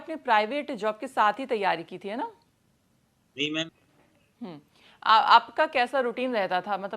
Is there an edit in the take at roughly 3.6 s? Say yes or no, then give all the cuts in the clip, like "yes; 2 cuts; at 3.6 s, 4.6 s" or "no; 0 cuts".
yes; 1 cut; at 3.6 s